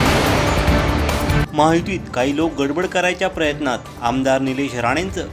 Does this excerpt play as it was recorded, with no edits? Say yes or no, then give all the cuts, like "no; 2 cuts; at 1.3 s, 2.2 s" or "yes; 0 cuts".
no; 1 cut; at 1.4 s